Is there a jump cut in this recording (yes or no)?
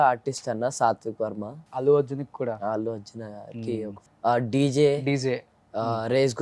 yes